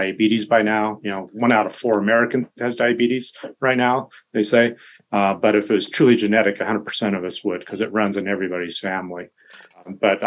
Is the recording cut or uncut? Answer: uncut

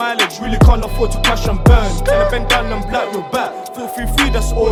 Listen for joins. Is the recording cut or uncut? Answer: uncut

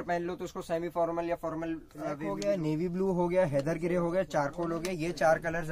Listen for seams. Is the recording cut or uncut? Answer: cut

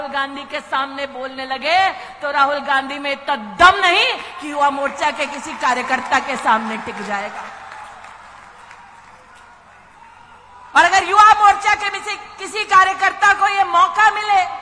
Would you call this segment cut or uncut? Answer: uncut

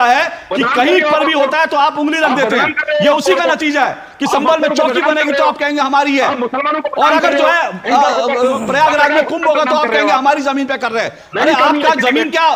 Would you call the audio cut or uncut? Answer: uncut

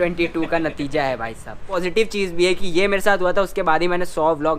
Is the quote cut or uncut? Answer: cut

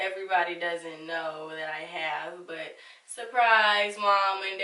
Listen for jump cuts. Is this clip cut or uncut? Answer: uncut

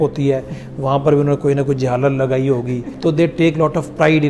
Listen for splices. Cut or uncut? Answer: cut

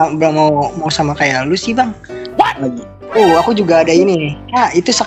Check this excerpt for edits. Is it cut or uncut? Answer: cut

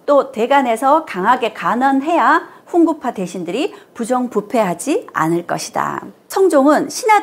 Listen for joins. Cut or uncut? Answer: cut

